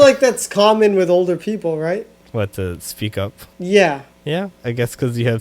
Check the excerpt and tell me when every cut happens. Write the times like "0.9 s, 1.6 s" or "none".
2.2 s, 3.4 s, 4.1 s